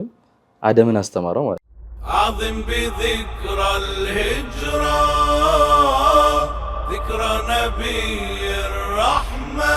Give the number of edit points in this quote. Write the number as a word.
one